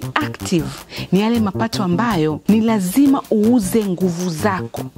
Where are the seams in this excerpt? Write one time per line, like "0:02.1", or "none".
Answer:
0:02.4